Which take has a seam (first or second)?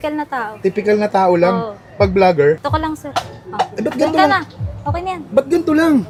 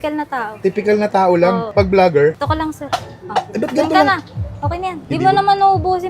second